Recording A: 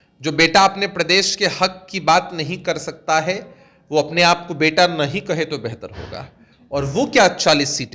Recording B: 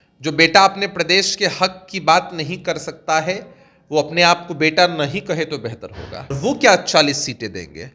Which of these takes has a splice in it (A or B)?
B